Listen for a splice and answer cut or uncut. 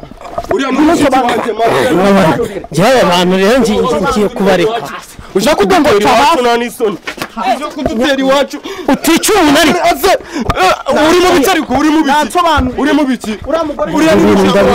uncut